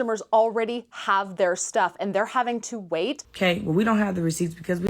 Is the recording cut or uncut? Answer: cut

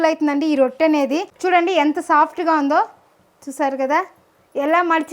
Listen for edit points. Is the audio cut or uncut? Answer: cut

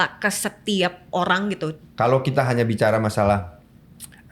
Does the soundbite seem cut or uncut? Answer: cut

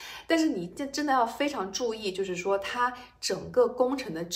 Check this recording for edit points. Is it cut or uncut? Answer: uncut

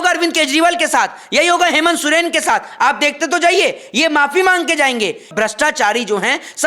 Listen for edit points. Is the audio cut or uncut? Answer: cut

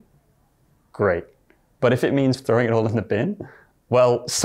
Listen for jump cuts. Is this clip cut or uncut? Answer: uncut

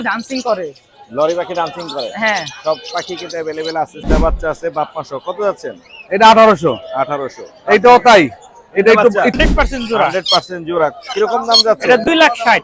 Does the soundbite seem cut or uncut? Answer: cut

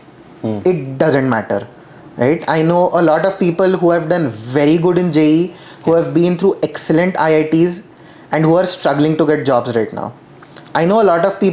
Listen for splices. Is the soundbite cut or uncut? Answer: uncut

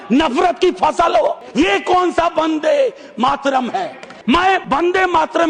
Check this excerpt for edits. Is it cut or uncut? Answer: cut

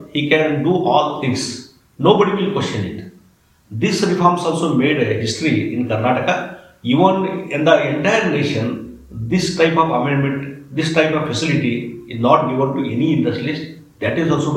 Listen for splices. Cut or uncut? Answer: uncut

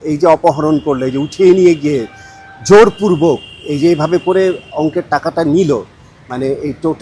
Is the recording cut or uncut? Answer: uncut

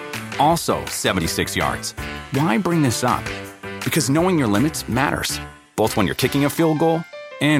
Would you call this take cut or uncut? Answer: uncut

